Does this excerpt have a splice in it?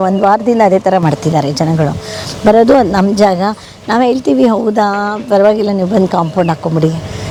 no; 0 cuts

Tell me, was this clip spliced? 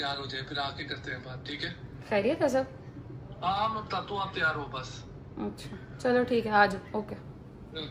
no; 0 cuts

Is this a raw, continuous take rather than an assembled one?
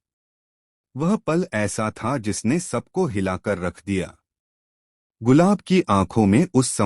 no; 1 cut; at 2.9 s

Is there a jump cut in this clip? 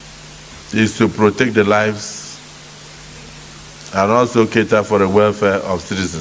no; 0 cuts

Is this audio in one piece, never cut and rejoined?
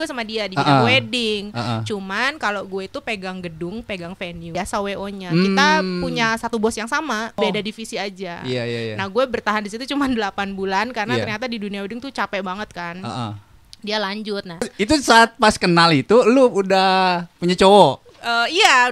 no; 3 cuts; at 4.5 s, 7.4 s, 14.7 s

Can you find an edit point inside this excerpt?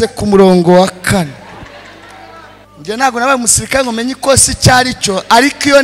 yes; 1 cut; at 2.6 s

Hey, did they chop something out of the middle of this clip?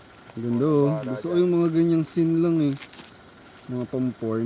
no; 0 cuts

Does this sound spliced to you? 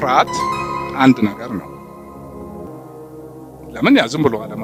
no; 0 cuts

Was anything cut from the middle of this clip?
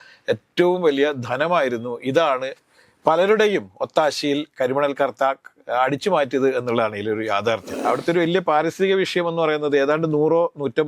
yes; 1 cut; at 7.8 s

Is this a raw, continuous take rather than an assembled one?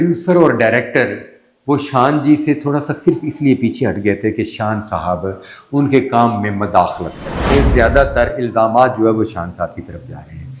no; 1 cut; at 7.5 s

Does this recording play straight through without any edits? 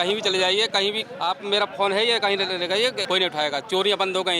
no; 2 cuts; at 1.1 s, 3.0 s

